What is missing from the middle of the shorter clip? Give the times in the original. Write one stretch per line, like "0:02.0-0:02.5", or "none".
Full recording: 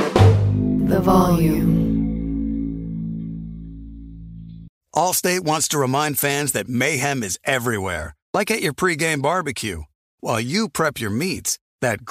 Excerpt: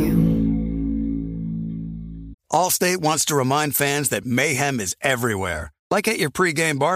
0:03.8-0:04.7